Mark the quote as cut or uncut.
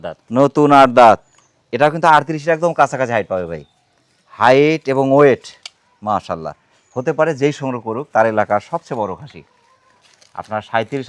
uncut